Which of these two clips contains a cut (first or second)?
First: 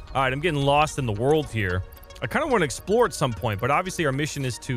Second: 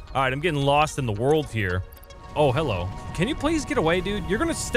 second